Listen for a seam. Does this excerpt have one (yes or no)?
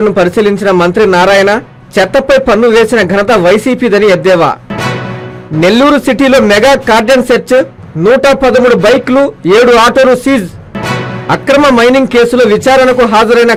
no